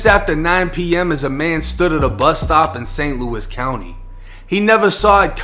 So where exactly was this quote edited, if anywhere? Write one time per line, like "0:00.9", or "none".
none